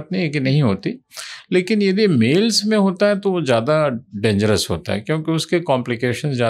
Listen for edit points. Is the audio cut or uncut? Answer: uncut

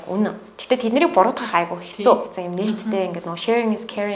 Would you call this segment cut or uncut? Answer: cut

